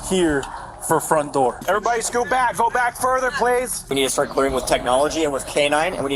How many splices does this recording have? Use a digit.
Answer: 2